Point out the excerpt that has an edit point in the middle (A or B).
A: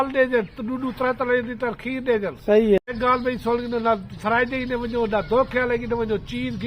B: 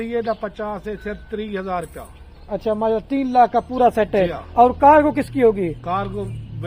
A